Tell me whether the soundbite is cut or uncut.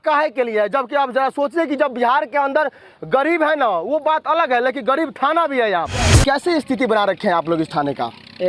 cut